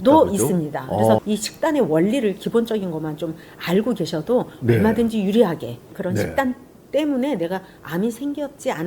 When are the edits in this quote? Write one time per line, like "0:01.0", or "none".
0:01.2
0:05.9